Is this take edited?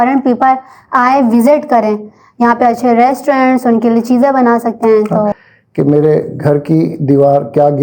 yes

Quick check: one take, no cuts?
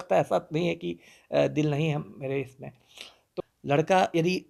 no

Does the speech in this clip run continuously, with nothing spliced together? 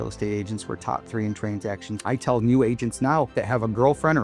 no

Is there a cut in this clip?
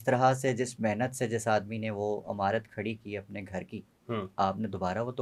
no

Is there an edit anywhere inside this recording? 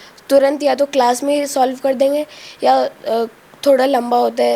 no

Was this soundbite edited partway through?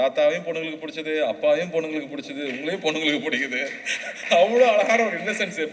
no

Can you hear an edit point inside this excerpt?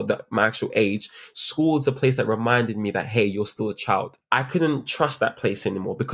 yes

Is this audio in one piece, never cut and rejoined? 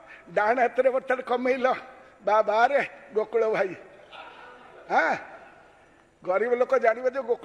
yes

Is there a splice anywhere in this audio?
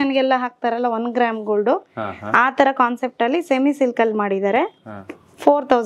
no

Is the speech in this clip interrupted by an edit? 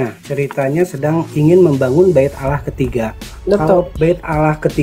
yes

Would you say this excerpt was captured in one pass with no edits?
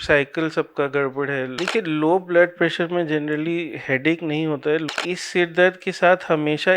no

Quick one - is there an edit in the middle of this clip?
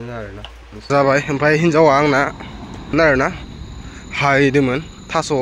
yes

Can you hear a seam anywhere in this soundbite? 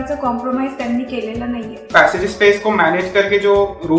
yes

